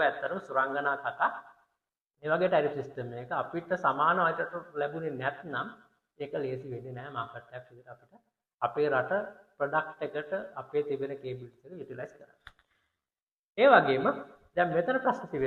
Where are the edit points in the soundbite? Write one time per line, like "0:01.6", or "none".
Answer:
none

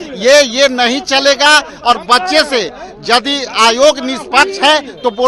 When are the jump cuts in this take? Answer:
none

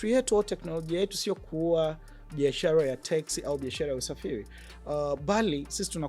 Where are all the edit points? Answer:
none

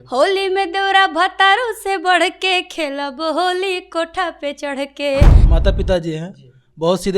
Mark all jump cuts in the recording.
0:05.4

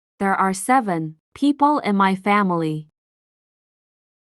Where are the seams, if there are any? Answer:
0:01.2

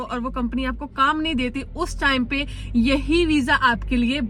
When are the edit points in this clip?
none

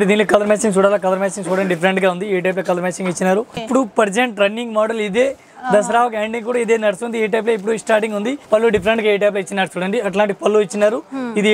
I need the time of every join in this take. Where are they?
0:03.6
0:08.4

